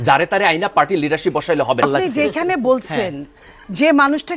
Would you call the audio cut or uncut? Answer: cut